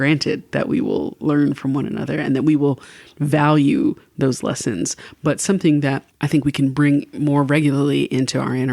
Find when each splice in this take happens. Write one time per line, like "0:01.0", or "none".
0:06.1